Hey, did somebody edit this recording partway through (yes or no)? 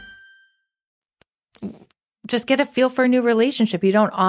no